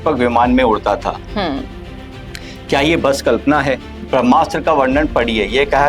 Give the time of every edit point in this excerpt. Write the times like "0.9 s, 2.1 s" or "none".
4.0 s